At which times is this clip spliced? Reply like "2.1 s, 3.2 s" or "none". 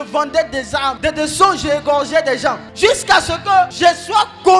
1.0 s, 2.6 s, 3.7 s